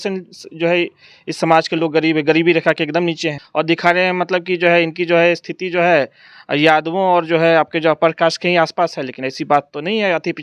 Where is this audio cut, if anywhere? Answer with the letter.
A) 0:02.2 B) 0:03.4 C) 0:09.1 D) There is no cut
B